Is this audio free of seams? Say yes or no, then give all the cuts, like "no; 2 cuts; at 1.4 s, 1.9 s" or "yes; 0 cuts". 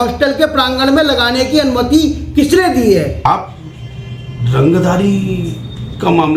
no; 1 cut; at 3.2 s